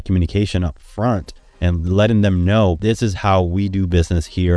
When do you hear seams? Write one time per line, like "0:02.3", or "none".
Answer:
0:01.4
0:02.8